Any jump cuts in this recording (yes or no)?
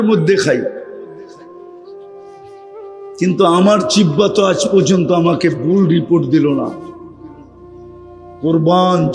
no